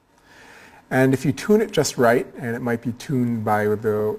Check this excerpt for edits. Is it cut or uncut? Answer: cut